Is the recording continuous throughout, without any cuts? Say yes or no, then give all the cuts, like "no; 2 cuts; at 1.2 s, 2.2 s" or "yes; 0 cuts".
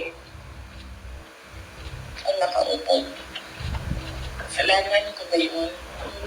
yes; 0 cuts